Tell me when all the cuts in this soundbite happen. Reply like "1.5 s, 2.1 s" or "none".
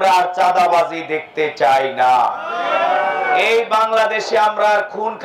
none